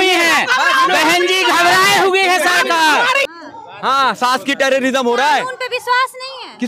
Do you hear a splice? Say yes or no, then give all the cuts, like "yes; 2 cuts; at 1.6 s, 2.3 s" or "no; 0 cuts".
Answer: yes; 1 cut; at 3.2 s